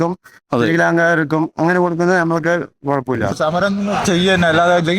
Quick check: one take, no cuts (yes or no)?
no